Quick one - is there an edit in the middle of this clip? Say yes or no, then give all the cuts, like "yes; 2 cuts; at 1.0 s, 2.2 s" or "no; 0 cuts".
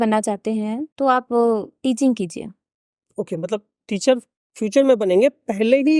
no; 0 cuts